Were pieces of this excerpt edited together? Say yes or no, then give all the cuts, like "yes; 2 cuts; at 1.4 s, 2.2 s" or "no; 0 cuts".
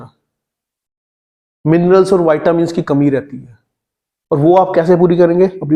no; 0 cuts